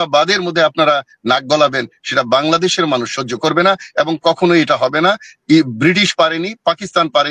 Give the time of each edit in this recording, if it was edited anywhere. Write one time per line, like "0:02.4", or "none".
none